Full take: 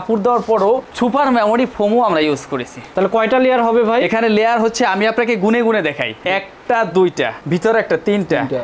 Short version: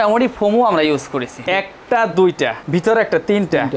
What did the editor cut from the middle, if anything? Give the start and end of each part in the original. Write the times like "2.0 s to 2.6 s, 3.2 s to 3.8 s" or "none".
2.7 s to 6.1 s

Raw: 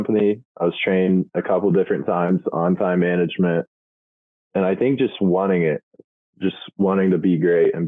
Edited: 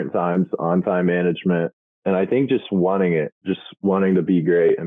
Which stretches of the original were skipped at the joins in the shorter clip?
3.8 s to 4.3 s, 5.8 s to 6.3 s

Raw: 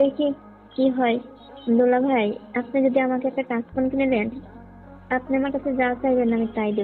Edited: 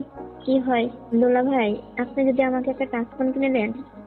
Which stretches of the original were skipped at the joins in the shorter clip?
1.3 s to 1.6 s

